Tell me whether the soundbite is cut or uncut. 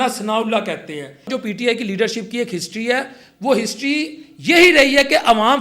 cut